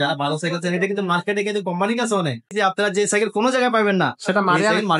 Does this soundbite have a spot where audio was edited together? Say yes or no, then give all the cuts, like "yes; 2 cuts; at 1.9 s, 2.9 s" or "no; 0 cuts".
yes; 1 cut; at 2.5 s